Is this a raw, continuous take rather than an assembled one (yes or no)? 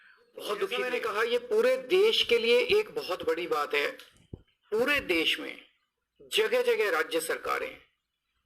no